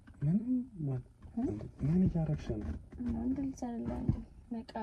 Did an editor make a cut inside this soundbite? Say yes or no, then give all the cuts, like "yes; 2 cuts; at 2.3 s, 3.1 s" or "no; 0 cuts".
no; 0 cuts